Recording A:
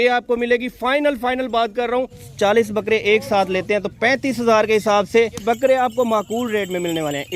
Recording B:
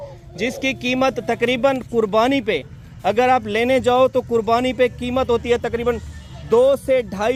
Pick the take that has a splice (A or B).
A